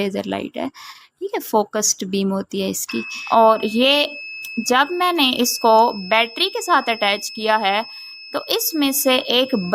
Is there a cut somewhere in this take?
yes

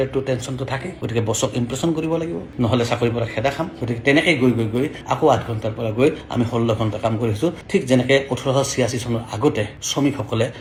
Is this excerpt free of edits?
yes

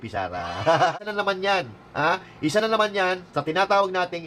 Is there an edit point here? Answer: yes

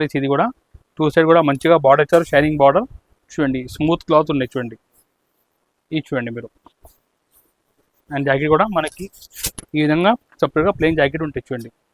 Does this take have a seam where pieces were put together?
no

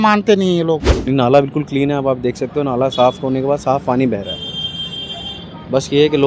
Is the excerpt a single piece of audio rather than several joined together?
no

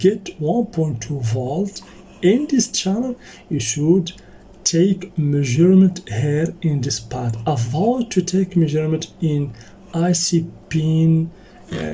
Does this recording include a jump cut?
no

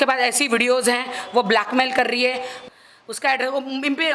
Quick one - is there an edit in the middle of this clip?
yes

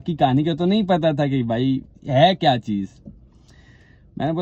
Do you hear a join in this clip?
no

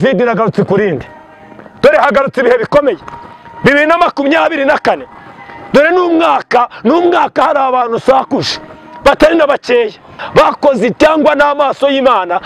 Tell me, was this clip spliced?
yes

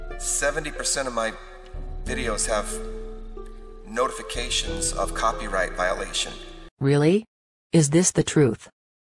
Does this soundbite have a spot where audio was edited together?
yes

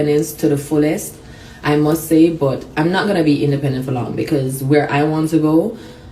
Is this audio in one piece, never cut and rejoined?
yes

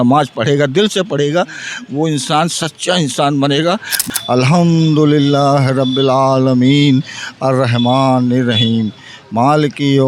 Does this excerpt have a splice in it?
yes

